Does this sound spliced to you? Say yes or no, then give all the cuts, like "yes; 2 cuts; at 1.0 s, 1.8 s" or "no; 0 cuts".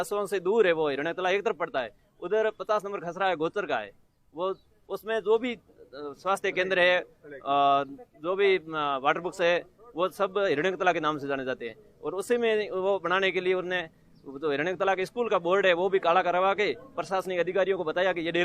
no; 0 cuts